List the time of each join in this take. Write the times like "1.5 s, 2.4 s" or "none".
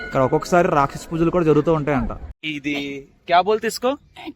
2.2 s